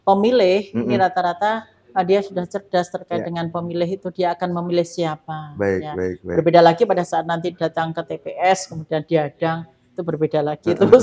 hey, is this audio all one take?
yes; 0 cuts

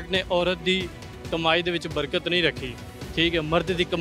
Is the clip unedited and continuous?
yes; 0 cuts

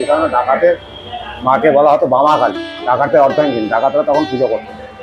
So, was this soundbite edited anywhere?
yes; 1 cut; at 2.7 s

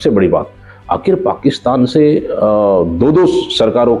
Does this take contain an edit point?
no; 0 cuts

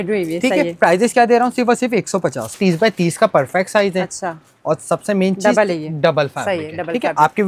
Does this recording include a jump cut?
yes; 1 cut; at 2.6 s

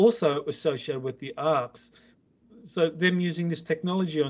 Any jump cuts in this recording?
yes; 1 cut; at 2.3 s

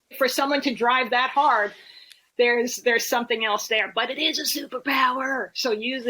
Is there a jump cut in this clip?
no; 0 cuts

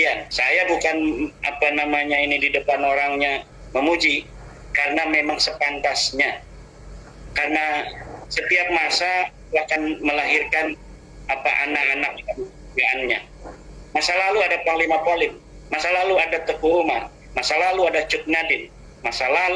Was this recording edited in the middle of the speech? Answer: no; 0 cuts

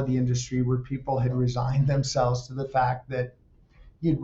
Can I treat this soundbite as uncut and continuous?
yes; 0 cuts

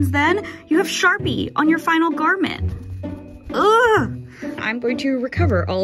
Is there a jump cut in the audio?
yes; 1 cut; at 4.5 s

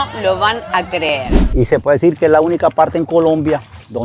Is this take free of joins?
no; 1 cut; at 1.4 s

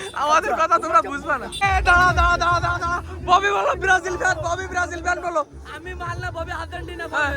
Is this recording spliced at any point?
yes; 1 cut; at 1.6 s

